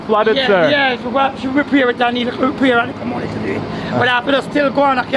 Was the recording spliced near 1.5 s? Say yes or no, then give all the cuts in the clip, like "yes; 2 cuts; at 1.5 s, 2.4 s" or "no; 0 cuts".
no; 0 cuts